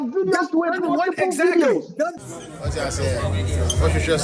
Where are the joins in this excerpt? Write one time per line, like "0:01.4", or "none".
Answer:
0:02.2